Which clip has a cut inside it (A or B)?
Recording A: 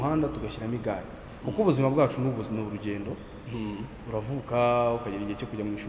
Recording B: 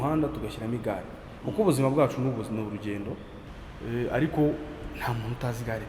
B